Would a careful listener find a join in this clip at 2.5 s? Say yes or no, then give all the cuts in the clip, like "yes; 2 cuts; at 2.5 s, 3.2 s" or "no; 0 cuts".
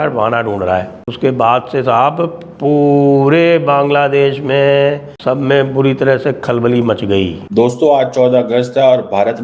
no; 3 cuts; at 1.0 s, 5.1 s, 7.4 s